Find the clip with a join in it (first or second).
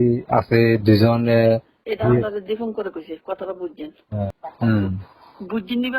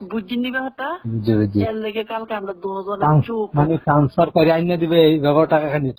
first